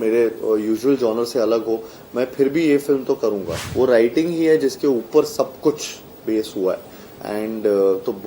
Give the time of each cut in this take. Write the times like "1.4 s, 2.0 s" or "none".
3.6 s